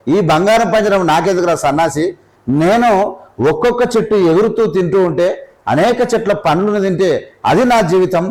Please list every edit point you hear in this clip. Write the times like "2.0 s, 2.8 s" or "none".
none